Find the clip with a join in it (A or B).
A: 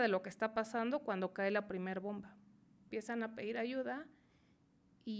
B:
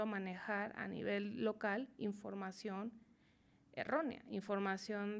A